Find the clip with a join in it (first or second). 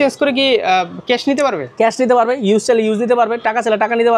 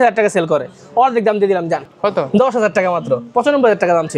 second